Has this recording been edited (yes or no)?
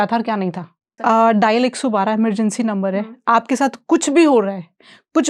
yes